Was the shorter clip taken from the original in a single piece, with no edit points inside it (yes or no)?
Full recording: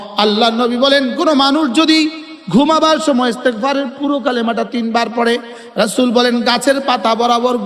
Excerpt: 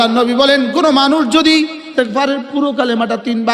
no